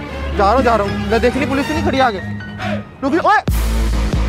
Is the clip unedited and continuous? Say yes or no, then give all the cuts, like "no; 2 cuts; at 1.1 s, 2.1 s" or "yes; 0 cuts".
yes; 0 cuts